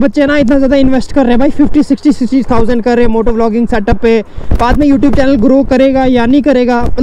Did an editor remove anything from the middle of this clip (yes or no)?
no